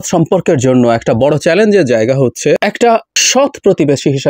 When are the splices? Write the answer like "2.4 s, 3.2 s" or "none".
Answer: 2.6 s